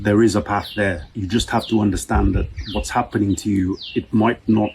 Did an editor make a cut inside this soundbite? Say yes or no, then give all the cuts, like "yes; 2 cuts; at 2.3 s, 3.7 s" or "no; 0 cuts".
yes; 1 cut; at 1.1 s